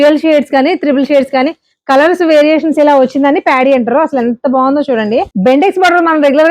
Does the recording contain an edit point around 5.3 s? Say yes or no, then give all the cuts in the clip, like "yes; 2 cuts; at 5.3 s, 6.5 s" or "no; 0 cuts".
yes; 1 cut; at 5.3 s